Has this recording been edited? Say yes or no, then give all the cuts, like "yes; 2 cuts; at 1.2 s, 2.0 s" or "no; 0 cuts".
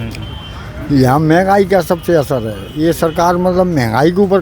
no; 0 cuts